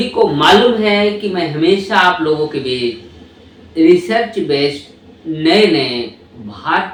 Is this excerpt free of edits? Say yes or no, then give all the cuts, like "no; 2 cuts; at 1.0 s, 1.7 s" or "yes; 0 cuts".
yes; 0 cuts